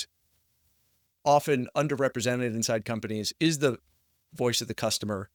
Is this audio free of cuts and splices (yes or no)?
yes